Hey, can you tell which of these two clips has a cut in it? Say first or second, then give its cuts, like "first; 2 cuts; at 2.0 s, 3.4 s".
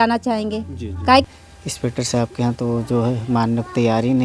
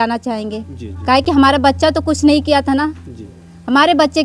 first; 1 cut; at 1.2 s